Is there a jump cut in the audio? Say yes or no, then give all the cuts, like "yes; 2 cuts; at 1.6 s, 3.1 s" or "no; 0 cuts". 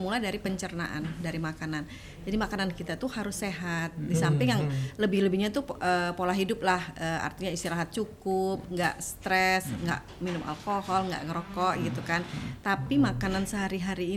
no; 0 cuts